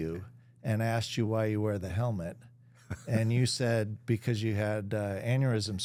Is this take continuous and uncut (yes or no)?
yes